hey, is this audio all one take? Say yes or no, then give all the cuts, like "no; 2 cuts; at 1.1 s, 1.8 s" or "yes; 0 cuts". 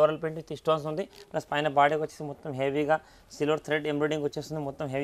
yes; 0 cuts